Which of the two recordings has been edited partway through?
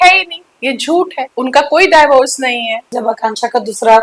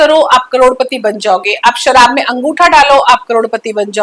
first; 2 cuts; at 1.2 s, 2.9 s

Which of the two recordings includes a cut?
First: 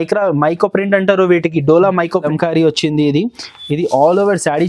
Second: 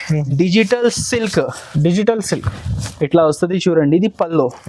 first; 1 cut; at 2.2 s

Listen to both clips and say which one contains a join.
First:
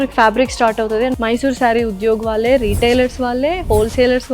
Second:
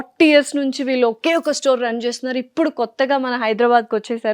first; 1 cut; at 1.2 s

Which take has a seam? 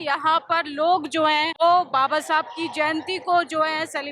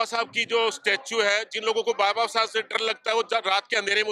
first; 1 cut; at 1.5 s

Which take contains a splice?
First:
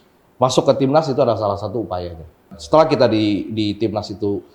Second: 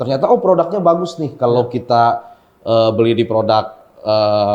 first; 1 cut; at 2.6 s

